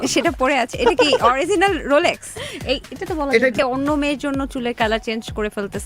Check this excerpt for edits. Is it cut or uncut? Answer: cut